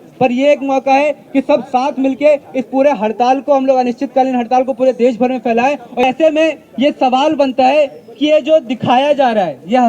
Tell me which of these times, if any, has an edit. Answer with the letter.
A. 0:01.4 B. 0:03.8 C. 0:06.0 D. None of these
C